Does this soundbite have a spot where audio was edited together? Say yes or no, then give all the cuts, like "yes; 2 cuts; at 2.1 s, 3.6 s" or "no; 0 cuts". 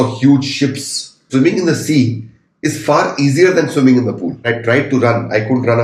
yes; 2 cuts; at 1.2 s, 4.5 s